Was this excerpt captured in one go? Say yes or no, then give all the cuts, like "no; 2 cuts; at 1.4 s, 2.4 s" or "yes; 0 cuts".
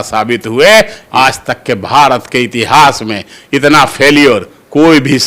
no; 1 cut; at 1.0 s